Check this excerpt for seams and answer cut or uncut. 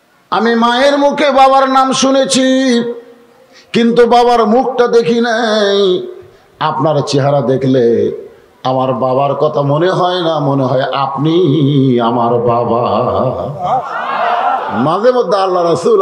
uncut